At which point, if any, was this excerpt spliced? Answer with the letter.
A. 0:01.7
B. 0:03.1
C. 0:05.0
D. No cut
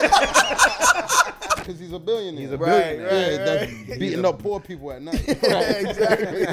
A